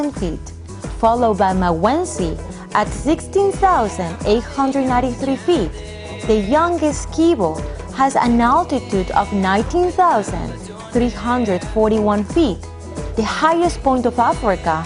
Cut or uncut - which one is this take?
cut